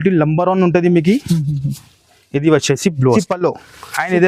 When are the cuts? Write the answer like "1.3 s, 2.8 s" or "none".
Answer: 3.1 s